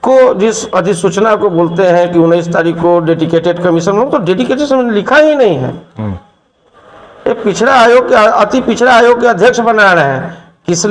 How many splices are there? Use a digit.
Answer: 0